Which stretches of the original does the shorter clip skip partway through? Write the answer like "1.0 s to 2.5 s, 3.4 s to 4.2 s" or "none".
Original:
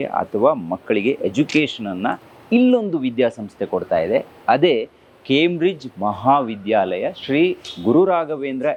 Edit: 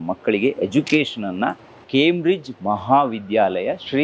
2.3 s to 5.0 s